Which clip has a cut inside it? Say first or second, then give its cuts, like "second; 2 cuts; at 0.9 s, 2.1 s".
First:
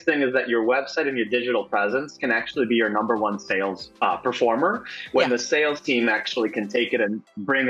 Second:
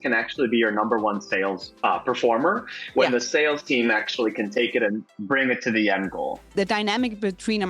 second; 1 cut; at 6.4 s